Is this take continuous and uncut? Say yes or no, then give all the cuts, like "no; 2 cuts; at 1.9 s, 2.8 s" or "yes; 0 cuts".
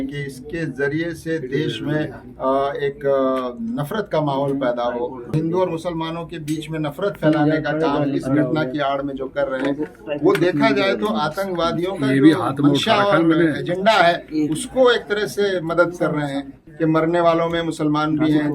no; 2 cuts; at 5.3 s, 16.6 s